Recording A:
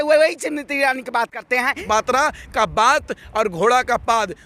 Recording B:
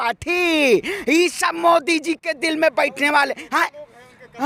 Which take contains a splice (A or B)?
A